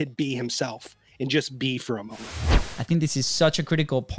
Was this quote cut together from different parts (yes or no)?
yes